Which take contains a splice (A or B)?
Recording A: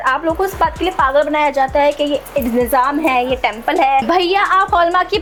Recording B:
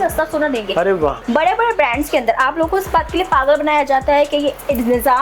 B